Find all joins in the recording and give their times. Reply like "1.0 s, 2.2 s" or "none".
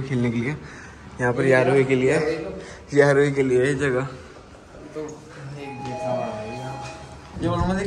none